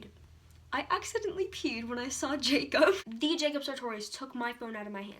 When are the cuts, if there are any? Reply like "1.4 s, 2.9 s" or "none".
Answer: 3.1 s